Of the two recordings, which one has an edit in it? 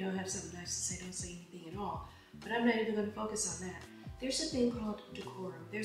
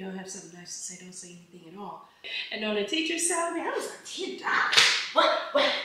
second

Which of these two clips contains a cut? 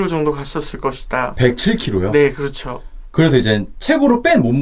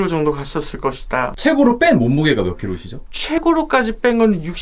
second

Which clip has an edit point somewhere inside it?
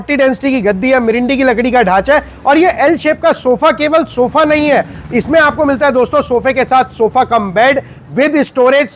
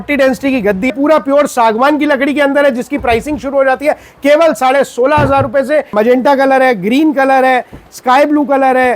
second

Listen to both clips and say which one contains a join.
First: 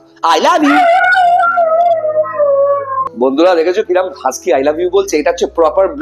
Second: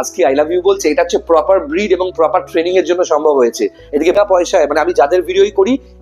second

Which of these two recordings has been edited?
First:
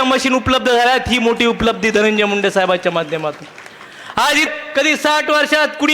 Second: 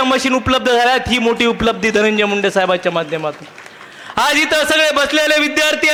first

